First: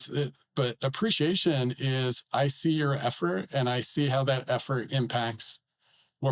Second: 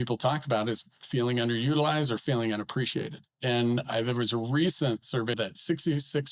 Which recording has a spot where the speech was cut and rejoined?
second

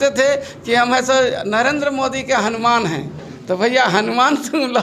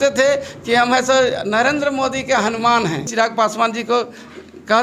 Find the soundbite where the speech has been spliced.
second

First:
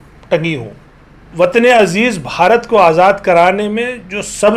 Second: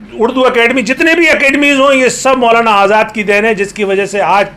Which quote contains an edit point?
first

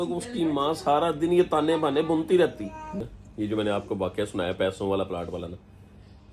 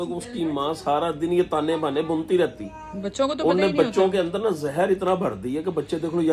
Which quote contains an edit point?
first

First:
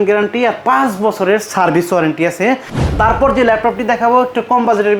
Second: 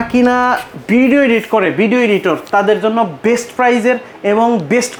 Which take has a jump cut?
first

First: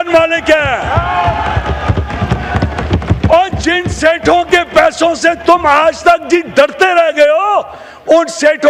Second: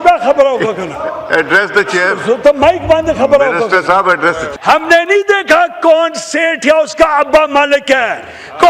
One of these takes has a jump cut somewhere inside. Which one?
second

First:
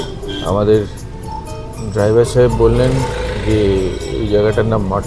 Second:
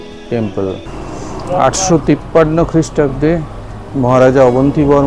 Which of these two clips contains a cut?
second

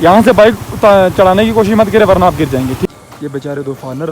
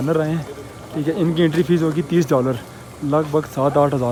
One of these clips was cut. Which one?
first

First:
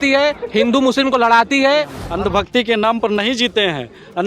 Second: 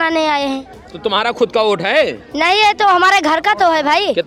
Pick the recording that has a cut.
first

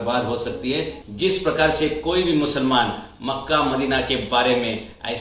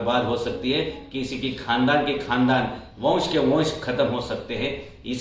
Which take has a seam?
first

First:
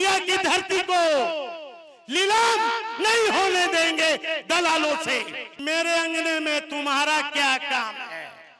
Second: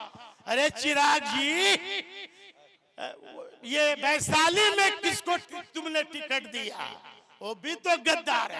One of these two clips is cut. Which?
first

